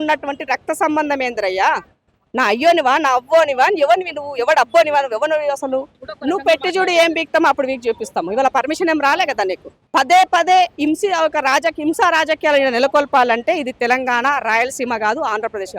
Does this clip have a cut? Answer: yes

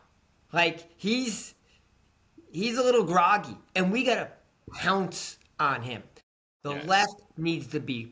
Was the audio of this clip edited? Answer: no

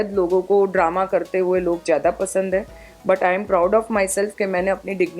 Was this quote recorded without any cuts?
yes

